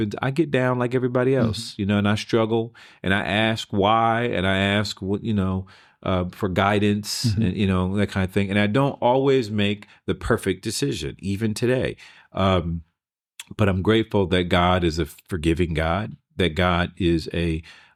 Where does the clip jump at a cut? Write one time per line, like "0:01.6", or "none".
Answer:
none